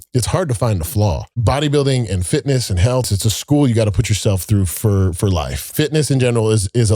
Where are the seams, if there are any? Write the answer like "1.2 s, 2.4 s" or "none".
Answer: 1.3 s, 3.1 s, 5.7 s